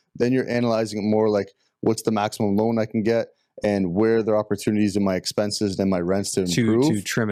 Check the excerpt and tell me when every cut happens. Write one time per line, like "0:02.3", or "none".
none